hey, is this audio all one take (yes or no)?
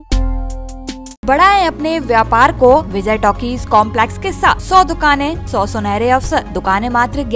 no